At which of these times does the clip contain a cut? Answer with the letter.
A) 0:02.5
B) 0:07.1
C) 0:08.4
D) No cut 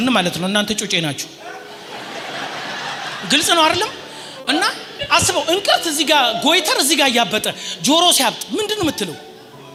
D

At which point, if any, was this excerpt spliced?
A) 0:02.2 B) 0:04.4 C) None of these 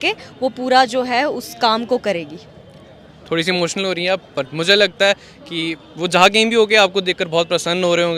C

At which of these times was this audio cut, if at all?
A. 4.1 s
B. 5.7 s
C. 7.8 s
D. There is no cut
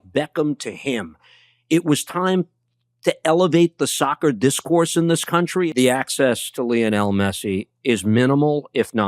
B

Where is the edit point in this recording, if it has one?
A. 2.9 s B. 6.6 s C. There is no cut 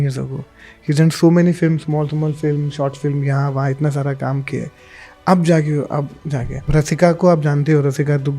B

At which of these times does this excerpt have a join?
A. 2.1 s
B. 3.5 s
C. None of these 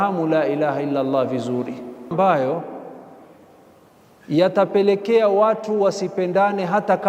A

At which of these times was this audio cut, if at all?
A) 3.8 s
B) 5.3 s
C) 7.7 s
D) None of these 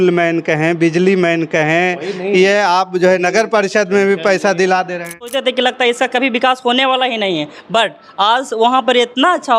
B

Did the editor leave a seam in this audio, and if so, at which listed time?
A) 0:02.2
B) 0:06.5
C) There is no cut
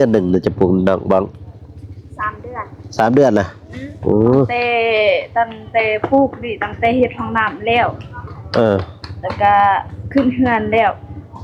C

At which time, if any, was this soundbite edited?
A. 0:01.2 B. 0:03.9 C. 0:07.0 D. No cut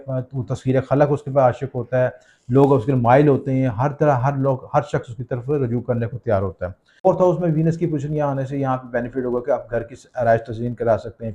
C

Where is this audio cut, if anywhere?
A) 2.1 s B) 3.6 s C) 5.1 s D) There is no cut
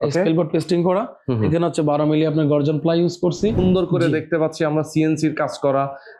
B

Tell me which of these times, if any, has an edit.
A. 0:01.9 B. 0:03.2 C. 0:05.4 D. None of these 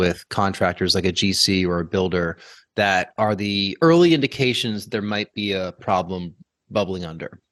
D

